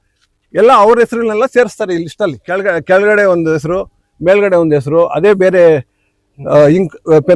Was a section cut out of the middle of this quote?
yes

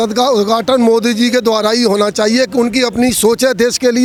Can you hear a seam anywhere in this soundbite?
no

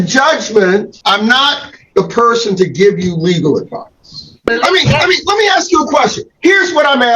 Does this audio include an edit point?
yes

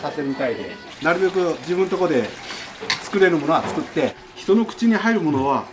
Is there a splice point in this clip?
yes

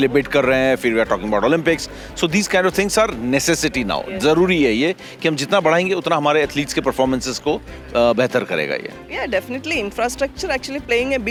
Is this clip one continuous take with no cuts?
yes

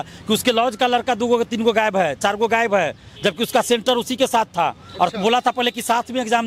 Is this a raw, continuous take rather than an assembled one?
yes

